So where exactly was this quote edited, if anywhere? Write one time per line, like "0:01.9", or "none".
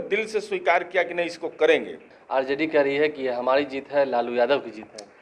0:02.1